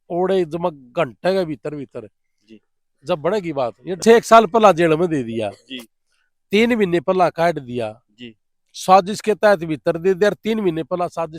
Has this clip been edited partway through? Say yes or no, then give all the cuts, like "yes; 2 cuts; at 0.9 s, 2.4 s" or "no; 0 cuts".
yes; 1 cut; at 4.0 s